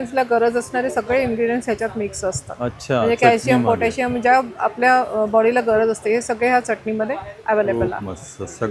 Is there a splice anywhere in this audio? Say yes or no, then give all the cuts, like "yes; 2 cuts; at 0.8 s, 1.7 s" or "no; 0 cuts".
no; 0 cuts